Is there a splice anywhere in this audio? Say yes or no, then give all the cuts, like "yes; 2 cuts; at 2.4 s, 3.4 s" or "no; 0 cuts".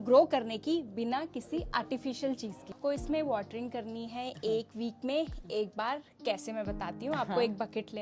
yes; 1 cut; at 2.8 s